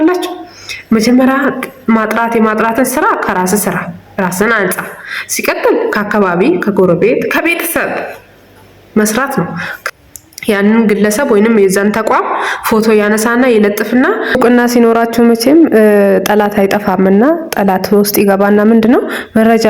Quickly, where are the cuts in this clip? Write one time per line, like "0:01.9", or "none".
0:09.7
0:14.4